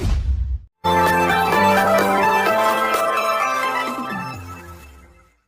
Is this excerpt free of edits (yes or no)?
yes